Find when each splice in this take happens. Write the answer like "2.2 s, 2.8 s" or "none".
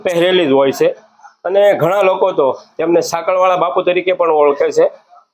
none